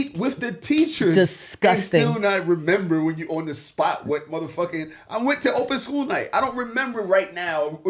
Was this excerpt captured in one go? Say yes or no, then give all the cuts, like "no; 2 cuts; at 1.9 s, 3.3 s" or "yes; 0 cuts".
yes; 0 cuts